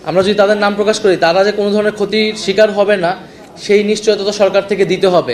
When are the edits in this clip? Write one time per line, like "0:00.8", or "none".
none